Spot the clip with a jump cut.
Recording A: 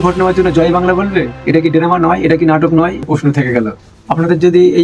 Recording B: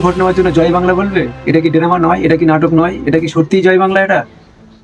A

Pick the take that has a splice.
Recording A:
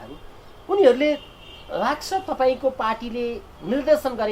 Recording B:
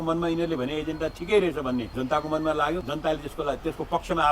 B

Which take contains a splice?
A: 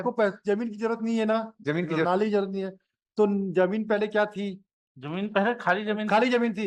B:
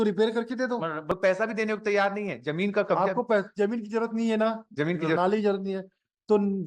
B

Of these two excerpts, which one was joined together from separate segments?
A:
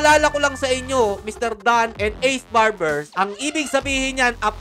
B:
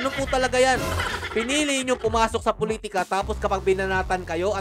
A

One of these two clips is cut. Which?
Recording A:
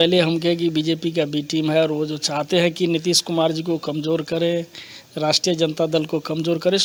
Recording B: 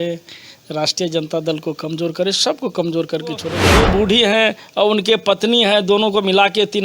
B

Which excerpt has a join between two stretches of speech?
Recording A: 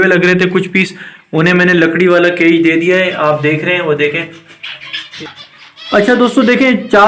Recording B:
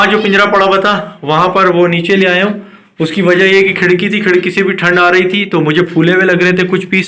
A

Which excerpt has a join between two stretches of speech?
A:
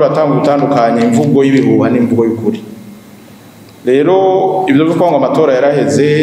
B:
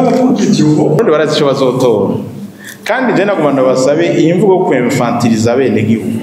B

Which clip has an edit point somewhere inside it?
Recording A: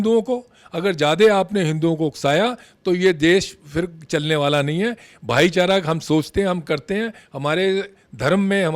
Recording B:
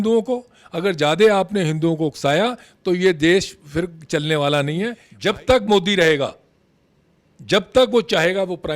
B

